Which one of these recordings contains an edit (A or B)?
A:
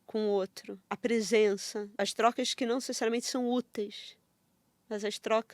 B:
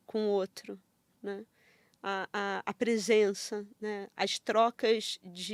A